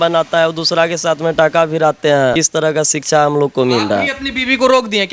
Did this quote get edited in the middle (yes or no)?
yes